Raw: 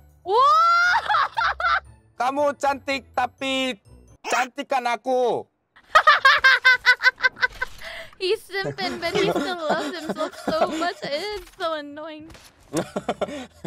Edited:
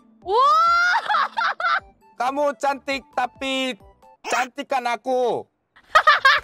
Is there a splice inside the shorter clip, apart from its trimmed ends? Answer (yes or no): no